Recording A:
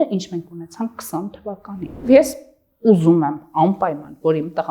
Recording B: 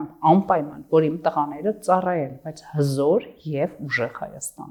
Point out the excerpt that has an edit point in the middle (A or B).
A